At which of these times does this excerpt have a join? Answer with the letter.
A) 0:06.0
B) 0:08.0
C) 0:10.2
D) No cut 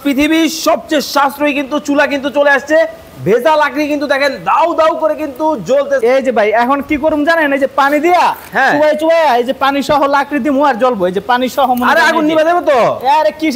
A